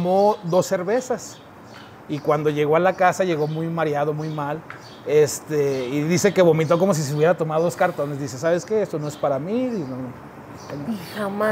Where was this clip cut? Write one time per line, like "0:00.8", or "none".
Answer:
none